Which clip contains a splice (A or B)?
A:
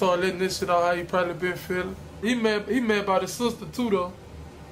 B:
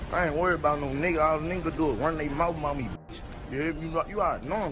A